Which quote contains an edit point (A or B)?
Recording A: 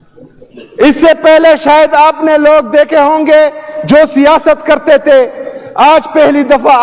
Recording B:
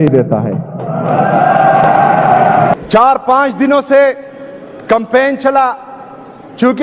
B